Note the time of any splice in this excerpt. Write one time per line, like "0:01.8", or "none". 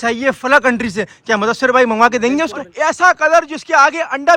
0:02.6